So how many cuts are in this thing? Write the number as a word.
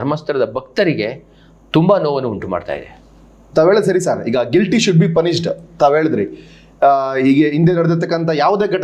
zero